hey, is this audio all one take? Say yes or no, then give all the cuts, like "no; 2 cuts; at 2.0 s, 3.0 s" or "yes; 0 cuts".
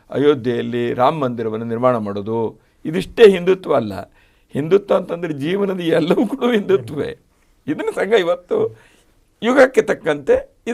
yes; 0 cuts